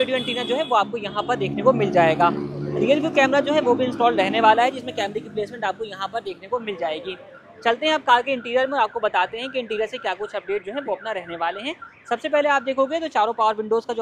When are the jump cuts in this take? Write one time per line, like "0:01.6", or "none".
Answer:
none